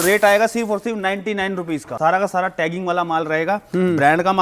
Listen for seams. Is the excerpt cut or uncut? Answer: cut